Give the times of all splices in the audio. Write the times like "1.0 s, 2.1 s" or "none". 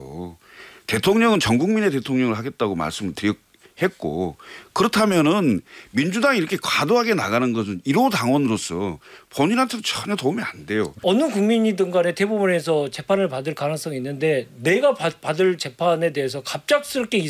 10.9 s